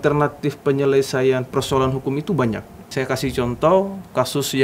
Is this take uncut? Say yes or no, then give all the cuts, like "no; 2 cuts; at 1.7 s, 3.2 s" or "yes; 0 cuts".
no; 1 cut; at 2.7 s